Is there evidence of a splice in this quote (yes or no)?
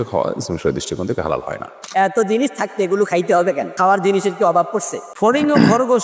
yes